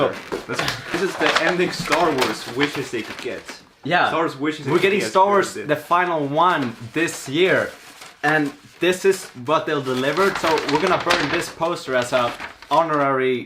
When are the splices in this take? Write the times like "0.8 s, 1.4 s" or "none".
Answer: 0.9 s